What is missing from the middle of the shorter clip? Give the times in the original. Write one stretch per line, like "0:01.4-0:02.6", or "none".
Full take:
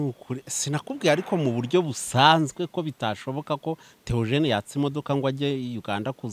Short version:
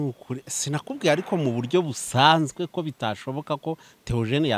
none